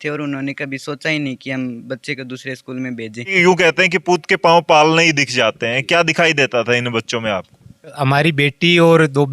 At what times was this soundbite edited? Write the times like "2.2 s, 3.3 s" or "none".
3.3 s, 8.0 s